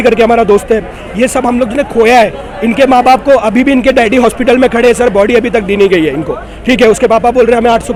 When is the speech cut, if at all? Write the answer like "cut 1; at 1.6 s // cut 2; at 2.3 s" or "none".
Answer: none